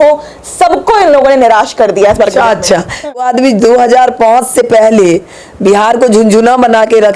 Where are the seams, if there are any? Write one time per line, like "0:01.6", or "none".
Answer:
0:03.2